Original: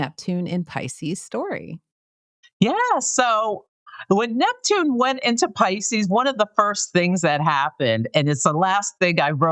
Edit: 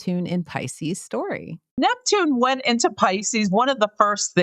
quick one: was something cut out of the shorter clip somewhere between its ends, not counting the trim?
yes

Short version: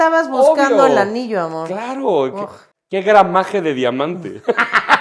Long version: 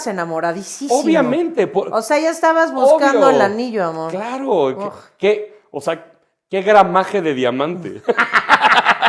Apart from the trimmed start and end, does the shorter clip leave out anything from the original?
yes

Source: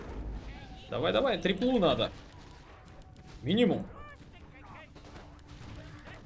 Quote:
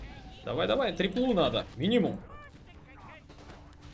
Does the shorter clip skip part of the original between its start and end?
yes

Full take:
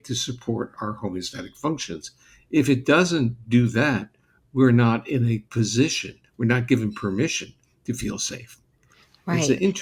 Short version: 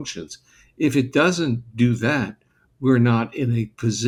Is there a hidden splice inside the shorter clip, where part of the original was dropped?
no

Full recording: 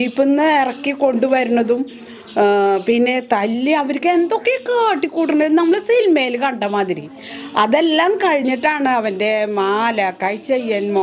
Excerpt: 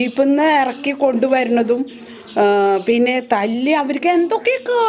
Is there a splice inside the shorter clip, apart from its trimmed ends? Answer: no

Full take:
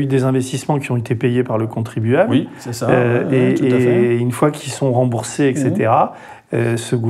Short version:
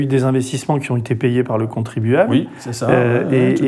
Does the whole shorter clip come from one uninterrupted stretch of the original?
yes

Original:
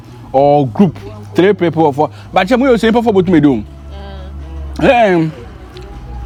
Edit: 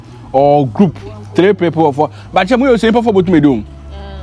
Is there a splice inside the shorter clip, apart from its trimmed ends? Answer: no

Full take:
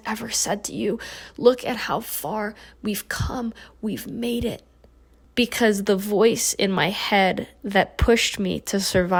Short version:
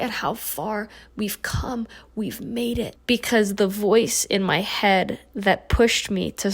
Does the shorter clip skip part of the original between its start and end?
yes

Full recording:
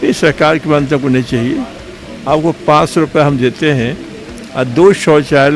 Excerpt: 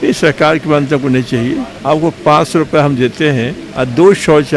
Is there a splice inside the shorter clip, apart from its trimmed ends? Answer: yes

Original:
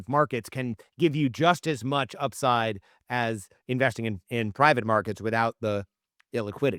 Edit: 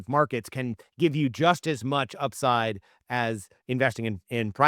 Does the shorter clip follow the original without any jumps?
yes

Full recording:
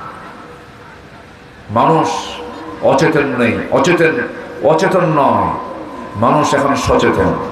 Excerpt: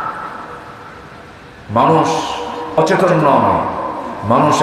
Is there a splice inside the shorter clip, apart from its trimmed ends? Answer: yes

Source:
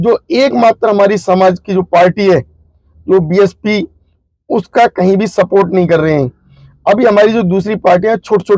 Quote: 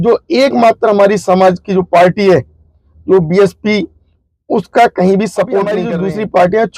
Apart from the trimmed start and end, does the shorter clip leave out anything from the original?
yes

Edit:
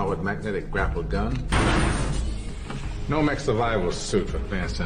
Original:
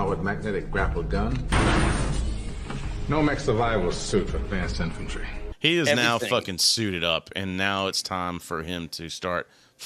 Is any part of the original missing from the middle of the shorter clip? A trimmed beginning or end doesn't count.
no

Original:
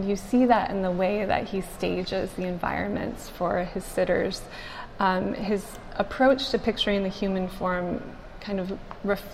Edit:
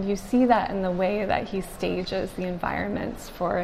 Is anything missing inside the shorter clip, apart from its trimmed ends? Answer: no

